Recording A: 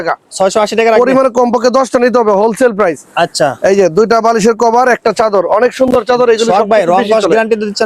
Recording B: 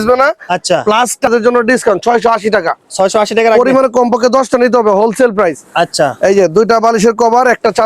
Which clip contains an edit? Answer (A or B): B